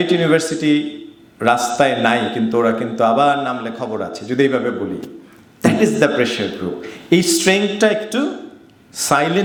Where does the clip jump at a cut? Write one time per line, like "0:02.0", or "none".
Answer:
none